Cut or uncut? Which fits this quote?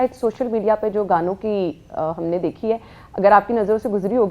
uncut